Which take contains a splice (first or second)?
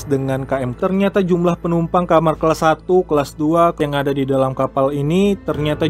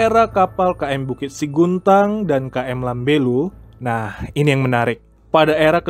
first